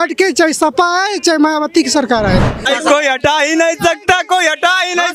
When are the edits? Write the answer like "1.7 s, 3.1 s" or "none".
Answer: 2.6 s

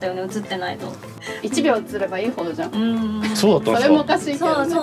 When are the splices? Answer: 1.1 s

